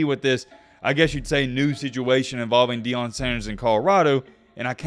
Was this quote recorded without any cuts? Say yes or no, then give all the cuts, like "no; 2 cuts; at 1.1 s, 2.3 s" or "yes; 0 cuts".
yes; 0 cuts